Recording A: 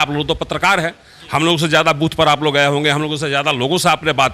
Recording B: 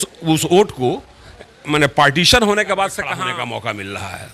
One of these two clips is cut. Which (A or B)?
B